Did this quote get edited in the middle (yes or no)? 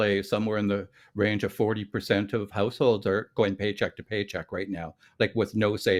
no